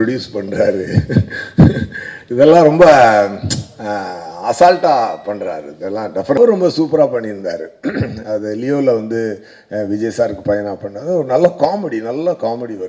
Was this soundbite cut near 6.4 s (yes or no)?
yes